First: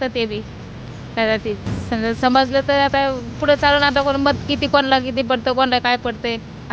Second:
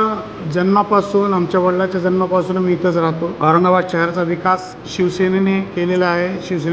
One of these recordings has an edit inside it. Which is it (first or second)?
second